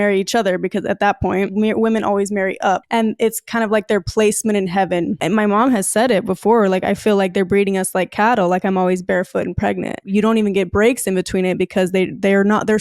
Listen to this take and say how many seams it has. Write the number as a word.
three